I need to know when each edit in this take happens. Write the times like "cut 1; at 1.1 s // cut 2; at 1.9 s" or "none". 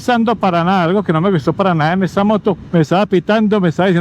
cut 1; at 2.7 s